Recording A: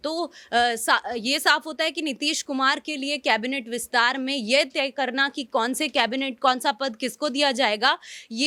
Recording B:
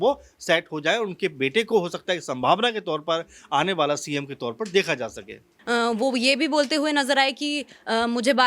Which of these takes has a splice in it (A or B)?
B